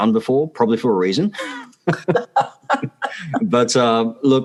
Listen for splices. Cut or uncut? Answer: uncut